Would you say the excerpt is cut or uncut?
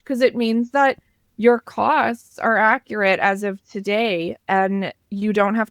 uncut